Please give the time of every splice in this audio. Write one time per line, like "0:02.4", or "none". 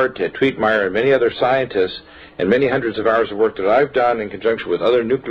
0:02.9